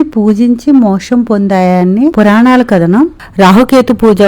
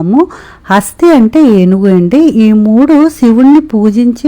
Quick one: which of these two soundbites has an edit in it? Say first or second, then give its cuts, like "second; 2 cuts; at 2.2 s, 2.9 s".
first; 2 cuts; at 2.1 s, 3.2 s